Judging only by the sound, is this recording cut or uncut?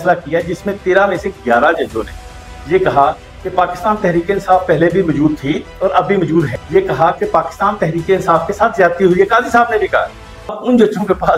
cut